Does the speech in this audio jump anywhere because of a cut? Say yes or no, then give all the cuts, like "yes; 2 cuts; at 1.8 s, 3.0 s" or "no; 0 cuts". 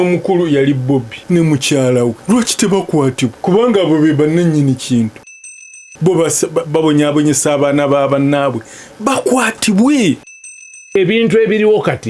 yes; 5 cuts; at 1.2 s, 2.2 s, 3.4 s, 5.6 s, 10.7 s